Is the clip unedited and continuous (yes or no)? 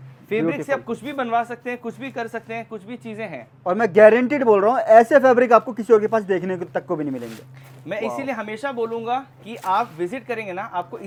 yes